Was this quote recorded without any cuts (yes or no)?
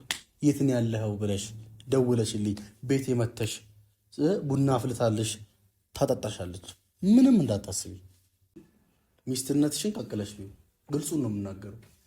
no